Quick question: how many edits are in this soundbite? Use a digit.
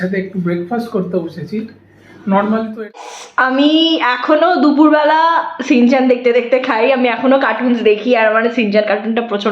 1